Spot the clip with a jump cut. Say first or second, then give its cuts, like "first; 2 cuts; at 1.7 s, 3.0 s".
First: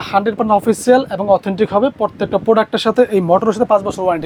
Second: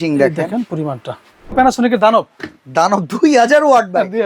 second; 1 cut; at 1.5 s